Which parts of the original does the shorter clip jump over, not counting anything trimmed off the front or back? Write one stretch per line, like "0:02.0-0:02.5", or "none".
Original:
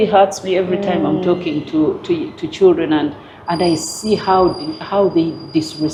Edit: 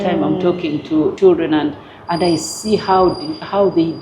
0:02.0-0:02.5